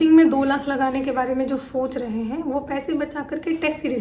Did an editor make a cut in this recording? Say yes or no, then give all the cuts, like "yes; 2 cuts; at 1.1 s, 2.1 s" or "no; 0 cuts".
no; 0 cuts